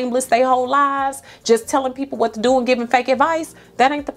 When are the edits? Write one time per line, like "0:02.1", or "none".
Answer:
none